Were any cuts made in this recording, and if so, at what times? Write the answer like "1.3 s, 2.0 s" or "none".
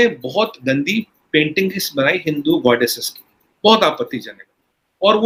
none